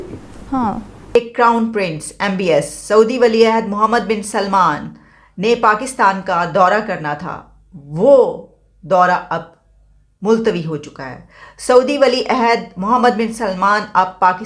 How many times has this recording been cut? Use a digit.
1